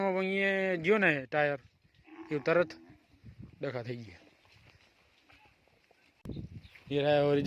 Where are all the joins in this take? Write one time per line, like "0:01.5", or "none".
0:06.2